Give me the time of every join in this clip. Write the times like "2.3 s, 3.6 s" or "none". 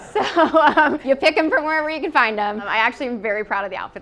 1.0 s, 2.7 s